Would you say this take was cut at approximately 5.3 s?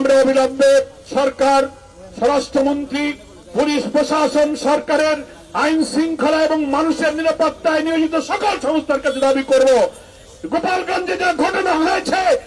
no; 1 cut; at 1.0 s

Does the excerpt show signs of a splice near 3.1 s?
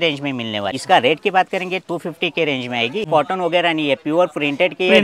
yes; 2 cuts; at 0.8 s, 3.1 s

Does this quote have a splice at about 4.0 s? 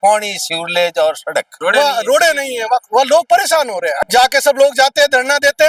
yes; 2 cuts; at 1.5 s, 4.0 s

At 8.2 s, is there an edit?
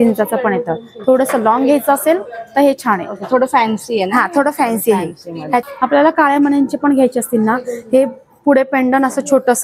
no; 1 cut; at 5.6 s

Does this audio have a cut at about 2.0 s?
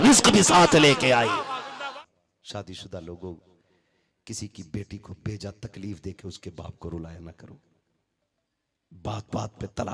yes; 1 cut; at 2.0 s

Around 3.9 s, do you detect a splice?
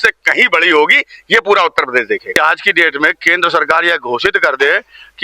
no; 1 cut; at 2.3 s

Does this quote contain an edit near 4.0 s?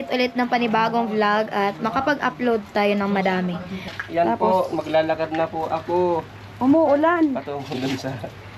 yes; 1 cut; at 4.0 s

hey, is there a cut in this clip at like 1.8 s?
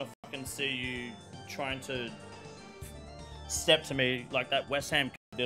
no; 0 cuts

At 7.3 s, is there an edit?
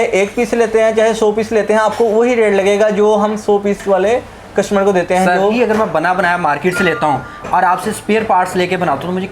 no; 1 cut; at 5.5 s

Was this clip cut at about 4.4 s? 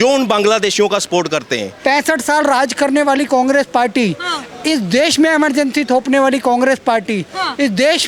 no; 1 cut; at 1.7 s

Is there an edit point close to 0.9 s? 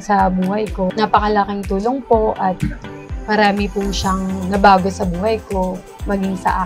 yes; 1 cut; at 0.9 s

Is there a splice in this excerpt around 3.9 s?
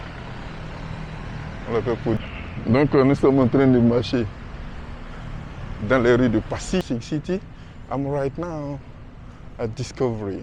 no; 2 cuts; at 2.2 s, 6.8 s

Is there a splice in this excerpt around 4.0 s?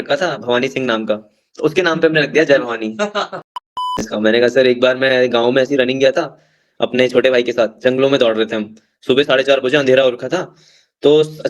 yes; 1 cut; at 4.0 s

